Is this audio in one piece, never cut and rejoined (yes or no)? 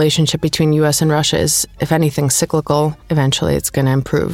no